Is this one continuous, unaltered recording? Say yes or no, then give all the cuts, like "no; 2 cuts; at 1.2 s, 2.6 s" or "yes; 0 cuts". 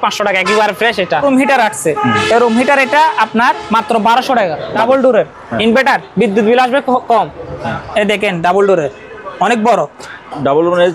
no; 2 cuts; at 1.2 s, 4.8 s